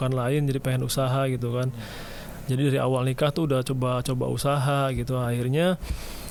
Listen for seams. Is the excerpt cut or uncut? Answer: uncut